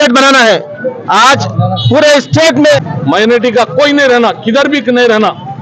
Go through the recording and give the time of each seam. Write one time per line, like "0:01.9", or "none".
0:02.9